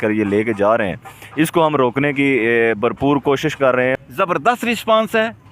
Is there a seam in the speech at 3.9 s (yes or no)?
yes